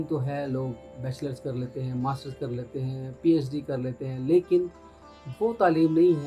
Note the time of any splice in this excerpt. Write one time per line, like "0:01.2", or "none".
none